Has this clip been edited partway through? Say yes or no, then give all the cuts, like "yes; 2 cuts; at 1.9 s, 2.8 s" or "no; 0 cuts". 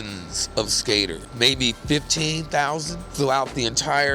yes; 2 cuts; at 1.3 s, 3.1 s